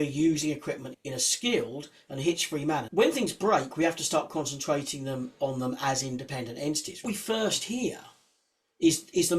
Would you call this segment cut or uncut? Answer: cut